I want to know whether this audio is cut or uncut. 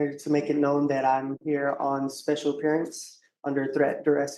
uncut